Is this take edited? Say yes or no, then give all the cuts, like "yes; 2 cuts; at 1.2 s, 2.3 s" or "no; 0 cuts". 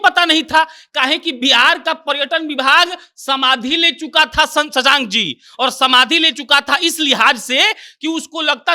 no; 0 cuts